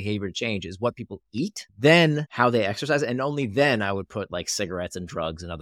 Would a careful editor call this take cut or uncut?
cut